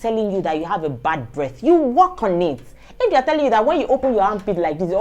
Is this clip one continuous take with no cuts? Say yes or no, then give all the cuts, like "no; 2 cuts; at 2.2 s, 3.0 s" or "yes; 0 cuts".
yes; 0 cuts